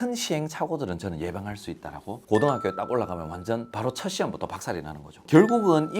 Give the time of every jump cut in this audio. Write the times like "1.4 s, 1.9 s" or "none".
2.1 s, 5.1 s